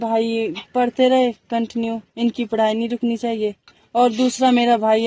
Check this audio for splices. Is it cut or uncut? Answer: cut